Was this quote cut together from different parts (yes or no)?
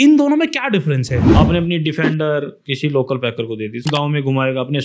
yes